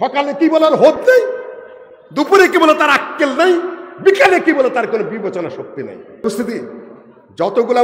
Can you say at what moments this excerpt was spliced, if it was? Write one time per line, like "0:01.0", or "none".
0:06.2